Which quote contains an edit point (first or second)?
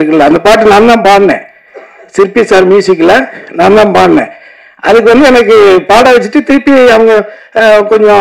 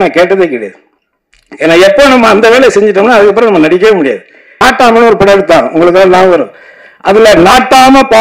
second